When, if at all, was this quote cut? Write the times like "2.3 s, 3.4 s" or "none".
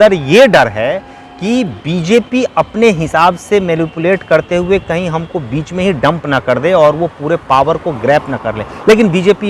none